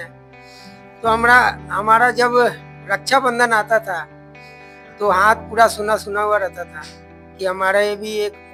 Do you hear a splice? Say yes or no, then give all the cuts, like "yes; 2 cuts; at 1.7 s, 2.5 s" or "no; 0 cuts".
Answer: no; 0 cuts